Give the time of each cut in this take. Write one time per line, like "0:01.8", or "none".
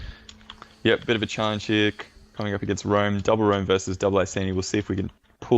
0:02.4